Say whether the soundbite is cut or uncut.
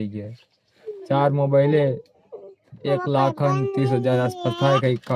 uncut